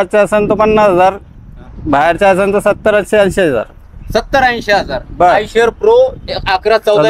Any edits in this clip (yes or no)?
no